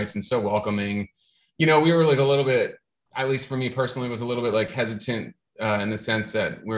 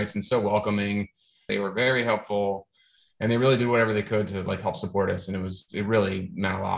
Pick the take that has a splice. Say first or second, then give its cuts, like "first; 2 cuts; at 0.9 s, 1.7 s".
second; 1 cut; at 1.4 s